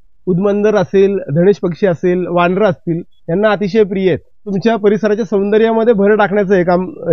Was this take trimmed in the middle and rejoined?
yes; 1 cut; at 4.4 s

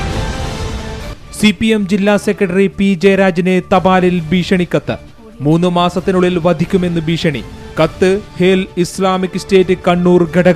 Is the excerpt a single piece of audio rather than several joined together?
no; 1 cut; at 1.0 s

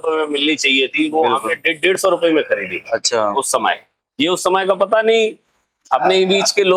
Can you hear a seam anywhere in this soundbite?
no; 0 cuts

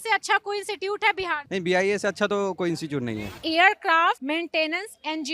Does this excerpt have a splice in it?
yes; 3 cuts; at 1.4 s, 3.4 s, 4.2 s

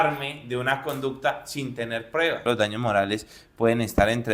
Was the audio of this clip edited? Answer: yes; 1 cut; at 2.4 s

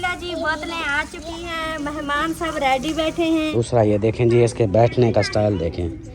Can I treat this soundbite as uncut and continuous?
no; 1 cut; at 3.5 s

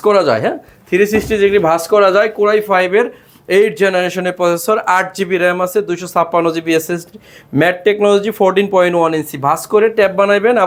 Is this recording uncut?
yes; 0 cuts

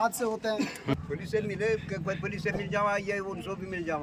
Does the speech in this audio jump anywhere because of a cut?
yes; 1 cut; at 1.1 s

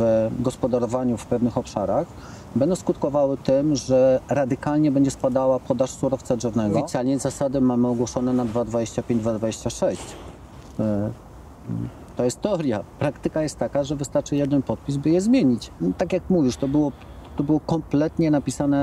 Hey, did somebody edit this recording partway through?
yes; 2 cuts; at 6.8 s, 15.7 s

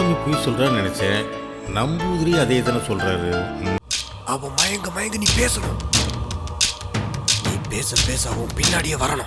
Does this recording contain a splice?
yes; 1 cut; at 3.8 s

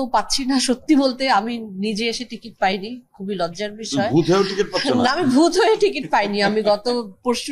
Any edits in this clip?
no; 0 cuts

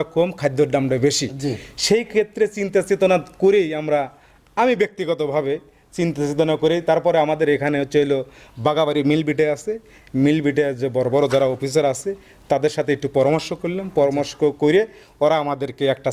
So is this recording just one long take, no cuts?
yes; 0 cuts

